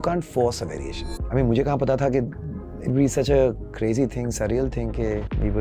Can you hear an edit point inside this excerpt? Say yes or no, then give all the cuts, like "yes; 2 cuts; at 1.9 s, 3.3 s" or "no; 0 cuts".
yes; 1 cut; at 1.2 s